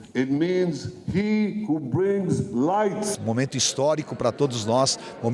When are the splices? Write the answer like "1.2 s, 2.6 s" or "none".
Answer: 3.1 s